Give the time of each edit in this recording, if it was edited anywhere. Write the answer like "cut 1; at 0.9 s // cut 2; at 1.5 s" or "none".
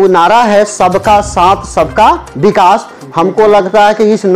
none